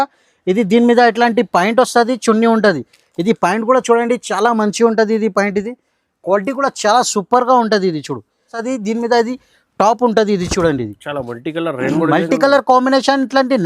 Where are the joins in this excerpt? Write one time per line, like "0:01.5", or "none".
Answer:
0:08.6